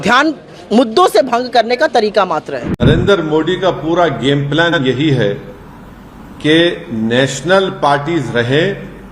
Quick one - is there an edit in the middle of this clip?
yes; 1 cut; at 2.8 s

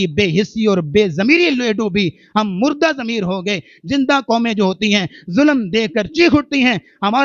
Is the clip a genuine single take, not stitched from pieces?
yes; 0 cuts

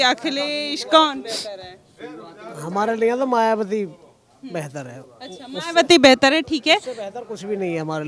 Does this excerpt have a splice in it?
no; 0 cuts

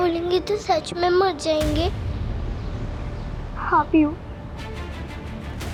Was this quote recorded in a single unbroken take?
yes; 0 cuts

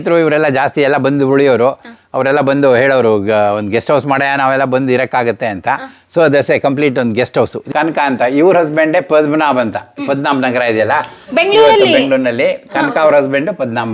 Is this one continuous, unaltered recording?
no; 1 cut; at 7.6 s

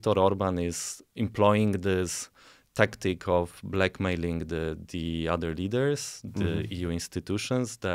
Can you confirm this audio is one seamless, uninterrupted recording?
no; 1 cut; at 1.1 s

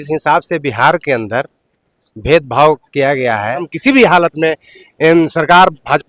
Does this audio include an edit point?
yes; 1 cut; at 3.7 s

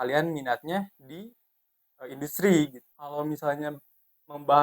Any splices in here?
yes; 1 cut; at 3.1 s

